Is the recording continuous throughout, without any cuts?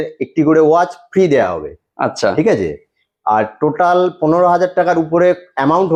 yes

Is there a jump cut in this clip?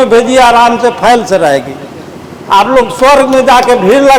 no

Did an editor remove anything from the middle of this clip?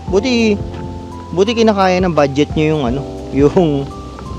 no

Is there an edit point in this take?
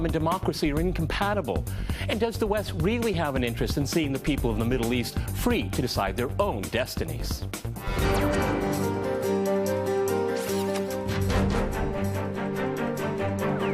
no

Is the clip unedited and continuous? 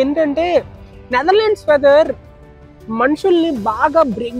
yes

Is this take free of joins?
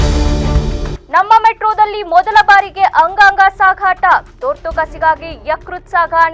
yes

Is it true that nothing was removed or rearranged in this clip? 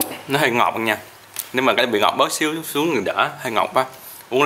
yes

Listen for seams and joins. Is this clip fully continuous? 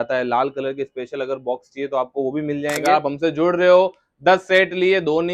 no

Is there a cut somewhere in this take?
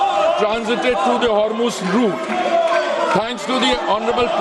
yes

